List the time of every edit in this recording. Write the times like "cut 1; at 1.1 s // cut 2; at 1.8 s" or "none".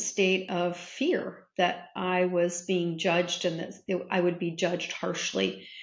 none